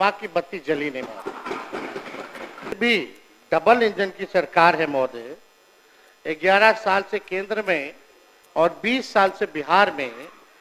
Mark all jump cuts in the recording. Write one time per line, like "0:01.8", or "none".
0:02.8